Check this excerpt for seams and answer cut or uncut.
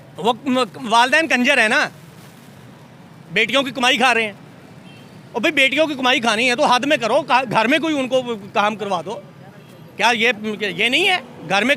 uncut